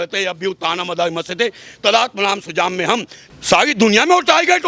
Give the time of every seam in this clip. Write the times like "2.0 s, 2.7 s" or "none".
3.2 s